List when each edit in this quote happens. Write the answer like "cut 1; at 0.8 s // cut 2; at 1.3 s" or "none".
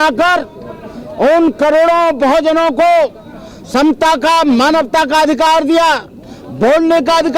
none